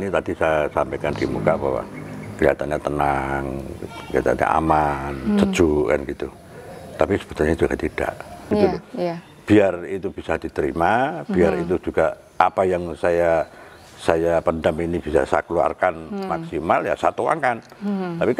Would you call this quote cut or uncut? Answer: cut